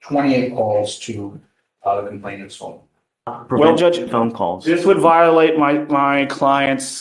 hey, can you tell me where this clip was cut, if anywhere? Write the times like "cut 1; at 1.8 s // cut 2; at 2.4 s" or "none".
cut 1; at 3.4 s